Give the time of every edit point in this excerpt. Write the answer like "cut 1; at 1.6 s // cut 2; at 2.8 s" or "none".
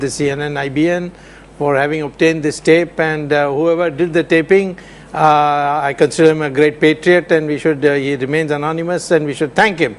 cut 1; at 5.6 s